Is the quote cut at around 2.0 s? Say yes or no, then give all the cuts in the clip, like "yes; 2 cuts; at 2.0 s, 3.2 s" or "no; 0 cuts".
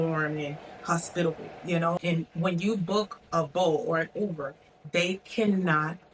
yes; 1 cut; at 2.0 s